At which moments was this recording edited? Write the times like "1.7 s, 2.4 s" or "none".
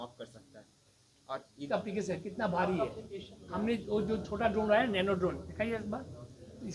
1.7 s

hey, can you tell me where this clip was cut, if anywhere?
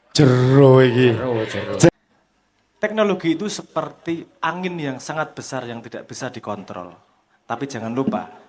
1.9 s

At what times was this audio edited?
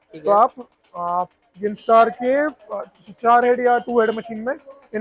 none

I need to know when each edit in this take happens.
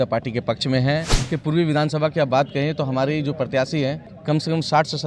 1.2 s, 4.1 s

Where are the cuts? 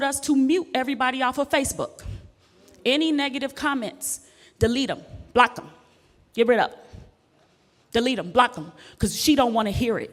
none

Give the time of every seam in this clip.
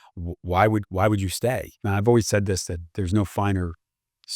1.7 s

